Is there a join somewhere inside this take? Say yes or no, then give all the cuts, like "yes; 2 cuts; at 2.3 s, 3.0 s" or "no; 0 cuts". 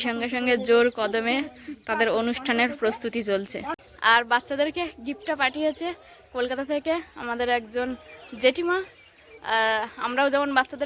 yes; 1 cut; at 3.7 s